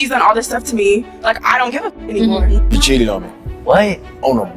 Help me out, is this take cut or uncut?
cut